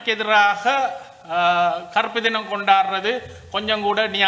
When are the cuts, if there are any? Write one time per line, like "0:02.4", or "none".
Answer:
none